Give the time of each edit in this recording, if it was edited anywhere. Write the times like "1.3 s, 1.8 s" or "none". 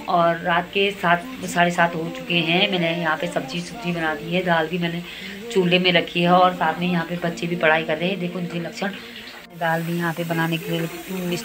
9.5 s